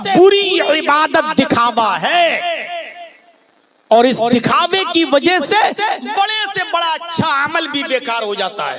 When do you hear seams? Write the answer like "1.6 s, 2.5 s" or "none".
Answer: none